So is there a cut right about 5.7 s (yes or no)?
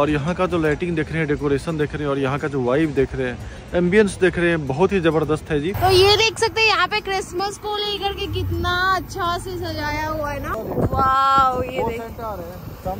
yes